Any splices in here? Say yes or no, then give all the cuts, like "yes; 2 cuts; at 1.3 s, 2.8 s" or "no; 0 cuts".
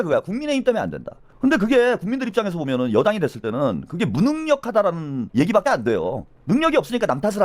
yes; 1 cut; at 5.2 s